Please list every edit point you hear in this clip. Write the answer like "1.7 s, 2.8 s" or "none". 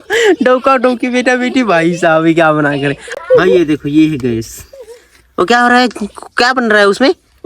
3.0 s